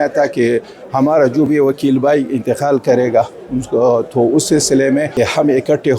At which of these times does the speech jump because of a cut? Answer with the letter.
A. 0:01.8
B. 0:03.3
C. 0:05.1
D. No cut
C